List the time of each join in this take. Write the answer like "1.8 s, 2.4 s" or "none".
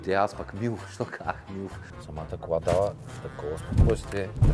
1.9 s